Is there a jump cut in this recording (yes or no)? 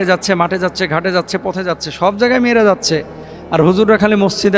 no